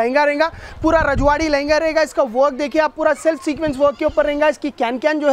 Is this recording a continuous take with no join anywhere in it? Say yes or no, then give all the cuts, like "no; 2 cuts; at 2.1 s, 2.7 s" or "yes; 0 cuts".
yes; 0 cuts